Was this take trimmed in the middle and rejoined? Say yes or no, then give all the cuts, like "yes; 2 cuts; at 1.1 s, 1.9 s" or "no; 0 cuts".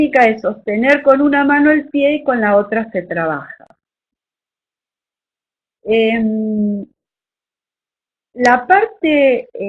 no; 0 cuts